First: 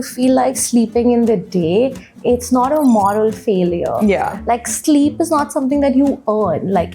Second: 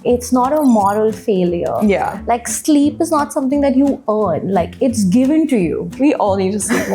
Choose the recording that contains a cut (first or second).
second